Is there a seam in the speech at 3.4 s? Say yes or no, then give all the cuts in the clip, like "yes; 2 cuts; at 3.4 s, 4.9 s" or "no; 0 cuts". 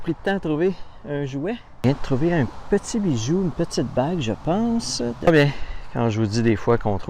no; 2 cuts; at 1.8 s, 5.3 s